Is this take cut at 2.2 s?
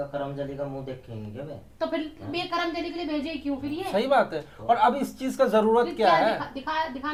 no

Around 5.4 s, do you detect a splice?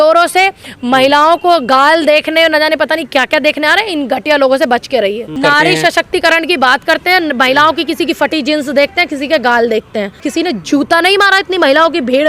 yes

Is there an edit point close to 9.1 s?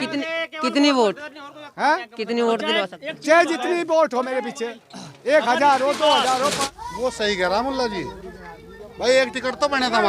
no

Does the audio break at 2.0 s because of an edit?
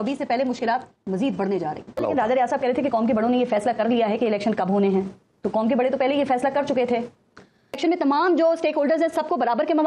yes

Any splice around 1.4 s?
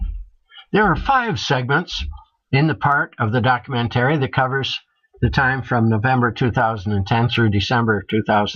yes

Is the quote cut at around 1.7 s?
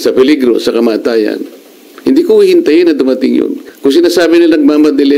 no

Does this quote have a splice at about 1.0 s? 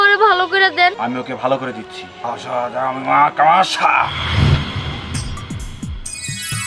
yes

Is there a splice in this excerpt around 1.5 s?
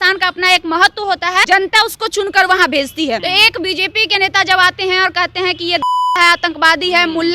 yes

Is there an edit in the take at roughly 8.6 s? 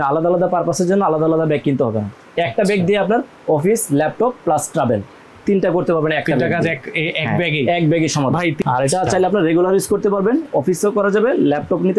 yes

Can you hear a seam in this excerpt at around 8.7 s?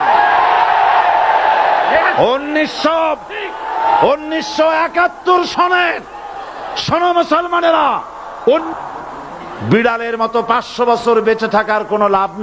yes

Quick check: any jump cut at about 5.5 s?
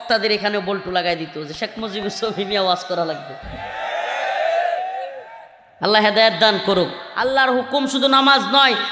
no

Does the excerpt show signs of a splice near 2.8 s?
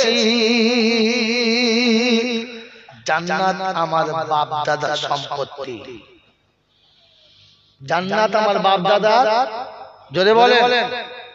yes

